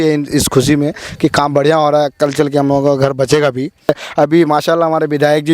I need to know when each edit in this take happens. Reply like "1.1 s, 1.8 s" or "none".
3.9 s